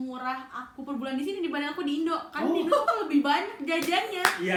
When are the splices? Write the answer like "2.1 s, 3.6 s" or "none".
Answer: none